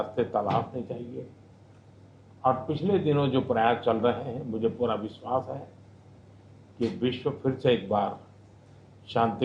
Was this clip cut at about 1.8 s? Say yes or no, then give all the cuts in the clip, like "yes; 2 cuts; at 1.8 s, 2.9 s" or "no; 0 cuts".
no; 1 cut; at 4.2 s